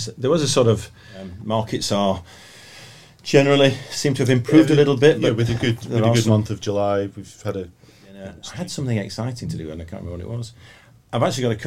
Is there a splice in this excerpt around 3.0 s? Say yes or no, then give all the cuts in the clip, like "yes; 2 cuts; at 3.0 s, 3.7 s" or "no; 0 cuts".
no; 2 cuts; at 1.3 s, 8.4 s